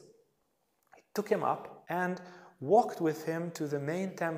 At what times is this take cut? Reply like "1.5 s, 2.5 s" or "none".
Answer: 1.7 s